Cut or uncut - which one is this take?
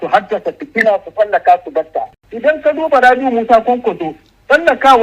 cut